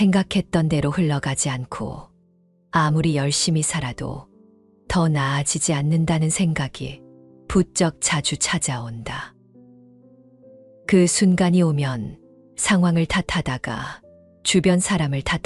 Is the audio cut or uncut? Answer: uncut